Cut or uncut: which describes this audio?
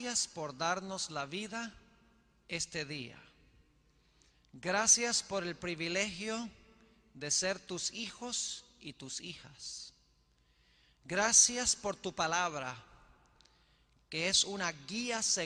uncut